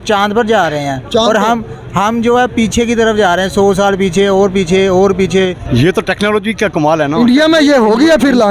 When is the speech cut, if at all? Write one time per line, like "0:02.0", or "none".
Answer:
0:05.6

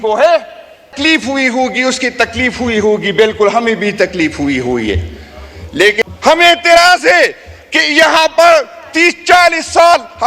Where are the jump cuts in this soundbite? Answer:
0:00.9
0:06.0

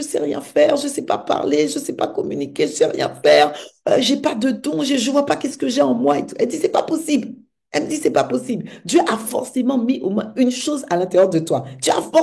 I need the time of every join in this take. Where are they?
none

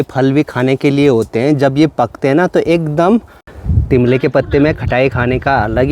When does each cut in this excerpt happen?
0:03.4

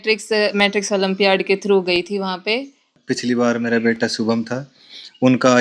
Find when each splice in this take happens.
0:02.9

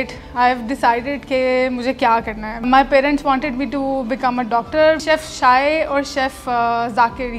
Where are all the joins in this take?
0:02.7
0:05.0

